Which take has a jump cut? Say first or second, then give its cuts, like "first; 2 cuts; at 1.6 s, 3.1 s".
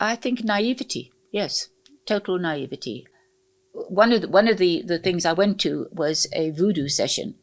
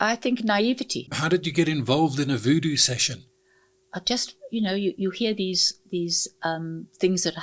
second; 1 cut; at 1.1 s